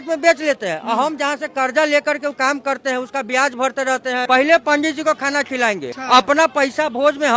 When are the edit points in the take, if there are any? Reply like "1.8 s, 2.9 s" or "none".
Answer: 4.2 s, 5.9 s